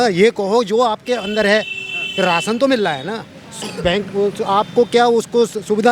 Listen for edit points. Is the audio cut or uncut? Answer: uncut